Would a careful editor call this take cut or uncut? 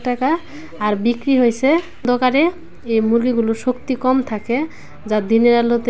cut